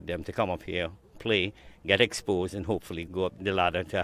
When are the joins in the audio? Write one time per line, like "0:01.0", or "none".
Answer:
0:03.1